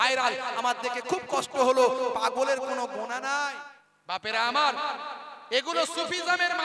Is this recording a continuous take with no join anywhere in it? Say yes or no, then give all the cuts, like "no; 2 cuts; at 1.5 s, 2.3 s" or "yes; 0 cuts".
no; 1 cut; at 3.6 s